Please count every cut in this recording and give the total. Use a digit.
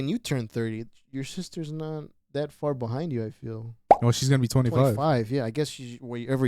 1